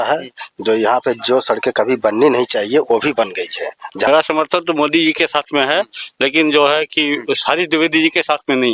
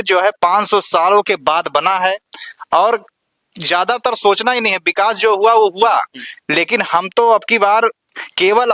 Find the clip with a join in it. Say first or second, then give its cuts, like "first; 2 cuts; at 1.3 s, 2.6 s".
first; 1 cut; at 4.1 s